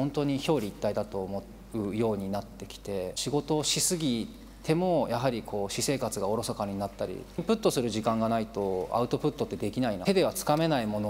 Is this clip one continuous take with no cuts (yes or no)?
no